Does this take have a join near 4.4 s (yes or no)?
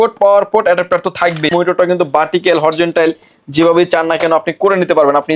no